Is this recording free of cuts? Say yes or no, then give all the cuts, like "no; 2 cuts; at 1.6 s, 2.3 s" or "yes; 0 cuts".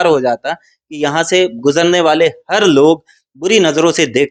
yes; 0 cuts